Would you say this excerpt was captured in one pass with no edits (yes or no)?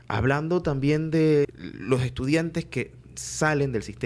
no